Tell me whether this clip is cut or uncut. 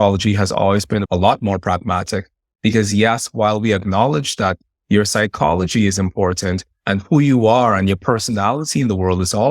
cut